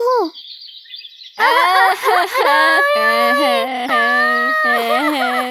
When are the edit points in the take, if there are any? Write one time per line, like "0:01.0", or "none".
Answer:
none